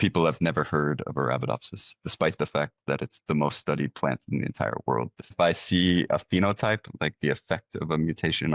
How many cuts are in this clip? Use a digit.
1